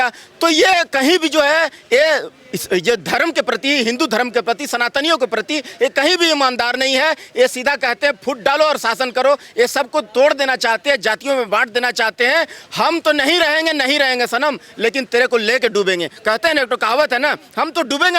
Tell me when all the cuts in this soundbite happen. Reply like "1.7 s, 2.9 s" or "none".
none